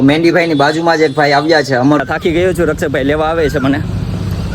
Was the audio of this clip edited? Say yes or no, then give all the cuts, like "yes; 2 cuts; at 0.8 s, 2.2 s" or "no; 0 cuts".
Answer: yes; 1 cut; at 2.0 s